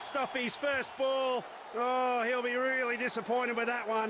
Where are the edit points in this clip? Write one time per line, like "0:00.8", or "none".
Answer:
none